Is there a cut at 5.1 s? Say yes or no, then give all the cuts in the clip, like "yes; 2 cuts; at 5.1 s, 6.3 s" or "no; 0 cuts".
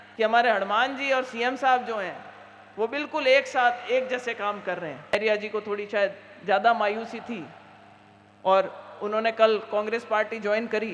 yes; 1 cut; at 5.1 s